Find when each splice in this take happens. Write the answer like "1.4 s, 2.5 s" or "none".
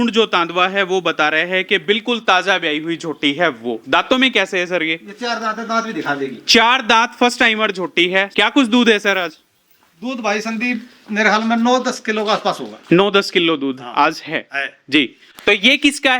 8.3 s, 15.2 s